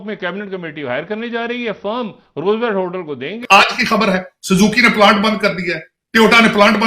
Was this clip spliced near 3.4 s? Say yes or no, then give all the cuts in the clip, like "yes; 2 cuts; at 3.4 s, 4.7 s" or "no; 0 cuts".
yes; 1 cut; at 3.4 s